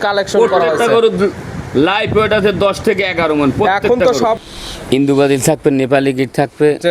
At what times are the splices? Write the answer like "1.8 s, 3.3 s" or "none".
4.4 s